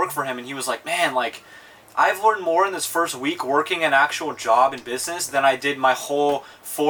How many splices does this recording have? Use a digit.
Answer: 0